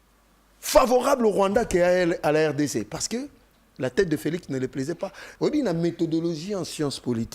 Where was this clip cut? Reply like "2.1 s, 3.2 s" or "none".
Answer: 5.2 s